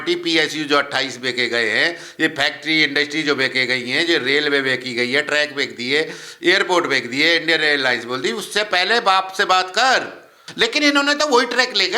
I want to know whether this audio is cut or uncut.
cut